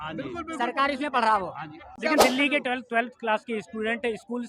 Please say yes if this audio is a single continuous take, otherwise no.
no